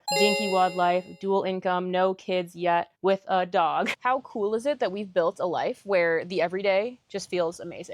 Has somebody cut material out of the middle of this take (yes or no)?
yes